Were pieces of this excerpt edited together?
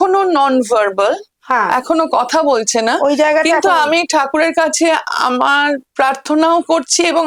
no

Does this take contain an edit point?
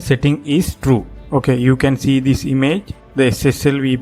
yes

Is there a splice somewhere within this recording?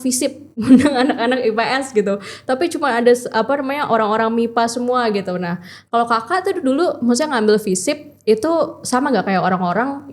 no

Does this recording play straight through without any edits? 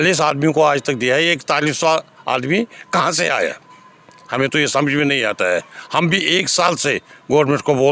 yes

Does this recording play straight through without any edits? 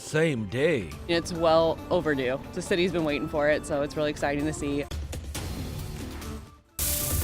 no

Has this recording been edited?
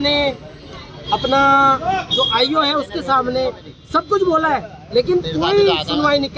no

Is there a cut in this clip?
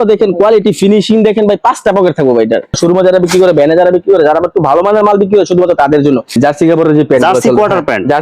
yes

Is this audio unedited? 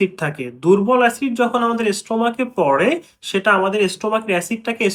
yes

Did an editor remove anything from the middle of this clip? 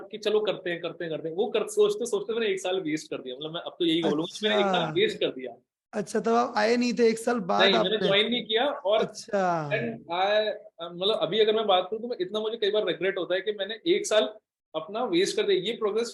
no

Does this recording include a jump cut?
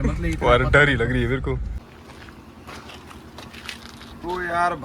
yes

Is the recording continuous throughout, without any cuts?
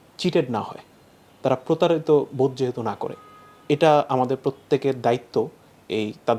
yes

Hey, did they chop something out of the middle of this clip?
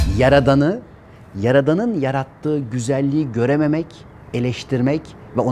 no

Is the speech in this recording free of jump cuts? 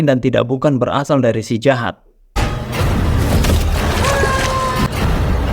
no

